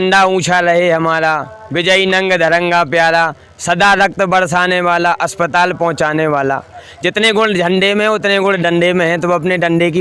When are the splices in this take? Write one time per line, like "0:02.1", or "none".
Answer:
none